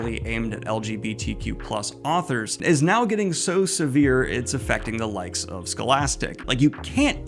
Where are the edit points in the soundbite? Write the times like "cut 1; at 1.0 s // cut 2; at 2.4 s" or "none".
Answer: cut 1; at 6.4 s